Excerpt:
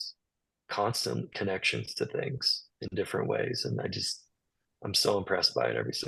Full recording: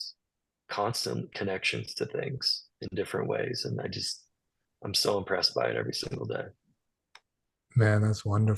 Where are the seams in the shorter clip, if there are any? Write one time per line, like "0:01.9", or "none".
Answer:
none